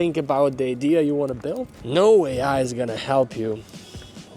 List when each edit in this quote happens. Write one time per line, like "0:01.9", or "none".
0:01.7